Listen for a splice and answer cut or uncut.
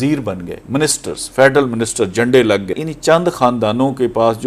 cut